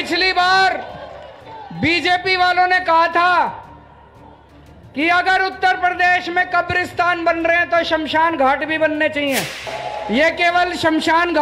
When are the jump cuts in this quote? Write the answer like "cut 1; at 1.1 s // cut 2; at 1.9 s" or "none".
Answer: cut 1; at 9.7 s

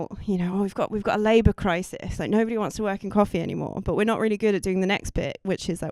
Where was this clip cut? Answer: none

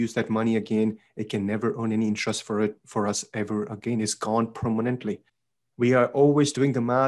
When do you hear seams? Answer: cut 1; at 5.3 s

